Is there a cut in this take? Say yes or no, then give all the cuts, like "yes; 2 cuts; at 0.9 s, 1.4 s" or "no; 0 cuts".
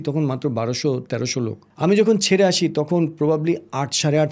yes; 1 cut; at 1.6 s